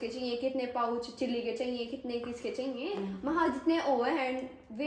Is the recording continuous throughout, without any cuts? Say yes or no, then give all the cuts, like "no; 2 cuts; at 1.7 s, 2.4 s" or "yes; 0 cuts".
yes; 0 cuts